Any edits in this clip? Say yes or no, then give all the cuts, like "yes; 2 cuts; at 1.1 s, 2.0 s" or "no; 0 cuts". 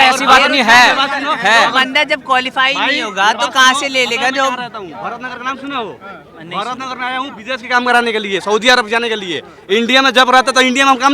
no; 0 cuts